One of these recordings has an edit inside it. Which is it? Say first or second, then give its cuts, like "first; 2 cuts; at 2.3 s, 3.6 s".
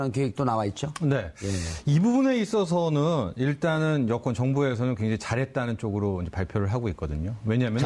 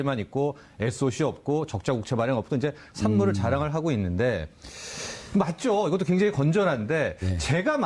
second; 1 cut; at 2.4 s